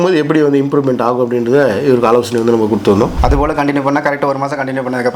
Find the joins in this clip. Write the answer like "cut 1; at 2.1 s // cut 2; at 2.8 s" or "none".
cut 1; at 3.2 s